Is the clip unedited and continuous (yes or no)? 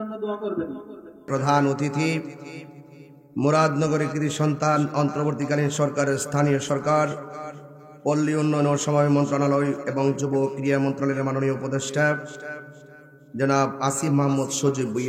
no